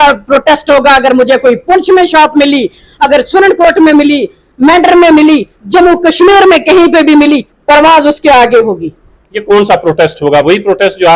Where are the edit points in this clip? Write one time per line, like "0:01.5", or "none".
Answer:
none

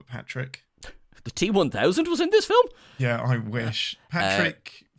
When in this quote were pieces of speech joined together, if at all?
0:01.3

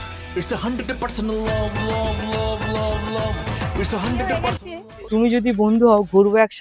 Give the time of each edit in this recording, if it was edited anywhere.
0:04.9

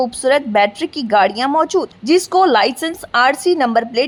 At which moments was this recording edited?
none

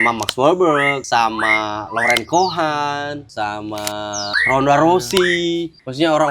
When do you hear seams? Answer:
none

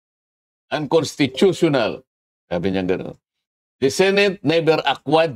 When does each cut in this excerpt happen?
none

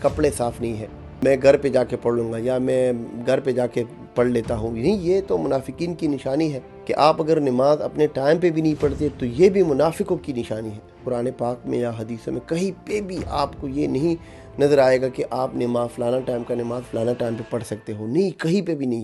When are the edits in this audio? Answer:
0:01.2
0:06.7
0:11.0

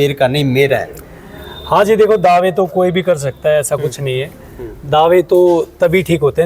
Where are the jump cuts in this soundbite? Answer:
none

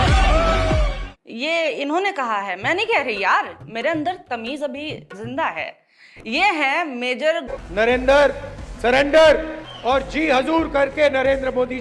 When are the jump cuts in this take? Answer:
0:07.5

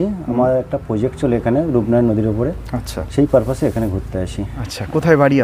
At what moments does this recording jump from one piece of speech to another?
0:04.5

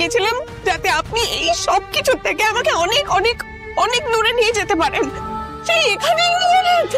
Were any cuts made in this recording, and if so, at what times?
0:05.2

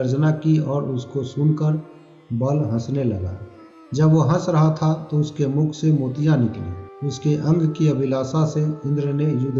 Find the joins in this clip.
none

